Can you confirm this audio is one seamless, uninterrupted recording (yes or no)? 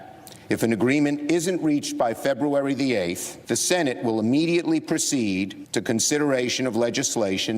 no